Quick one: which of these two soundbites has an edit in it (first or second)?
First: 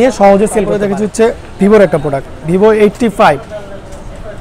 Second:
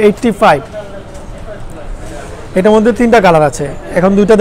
first